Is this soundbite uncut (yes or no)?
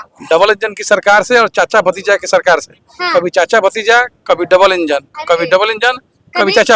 yes